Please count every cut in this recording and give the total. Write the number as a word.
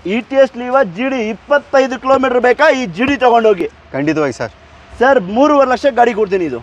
zero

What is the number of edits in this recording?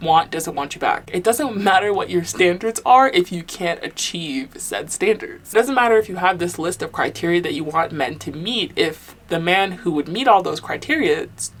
zero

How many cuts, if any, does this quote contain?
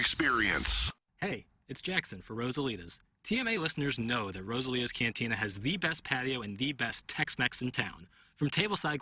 one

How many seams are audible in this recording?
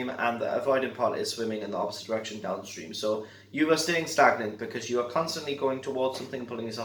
zero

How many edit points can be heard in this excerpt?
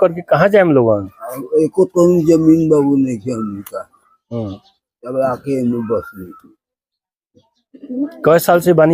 zero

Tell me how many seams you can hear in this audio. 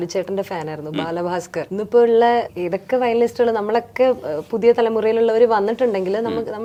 zero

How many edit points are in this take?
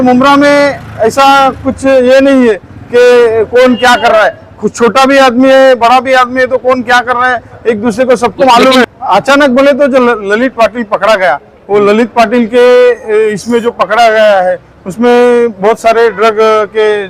one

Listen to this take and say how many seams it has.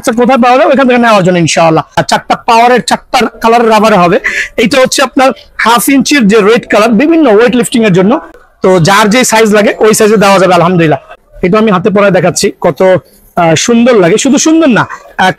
three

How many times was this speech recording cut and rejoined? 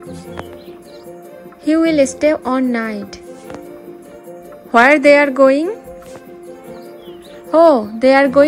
three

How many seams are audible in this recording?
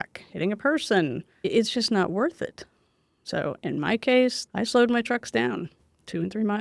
two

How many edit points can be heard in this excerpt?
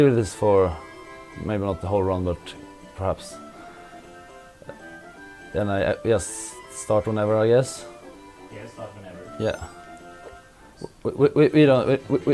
zero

